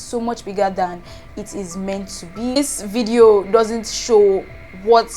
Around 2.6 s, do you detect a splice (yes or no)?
yes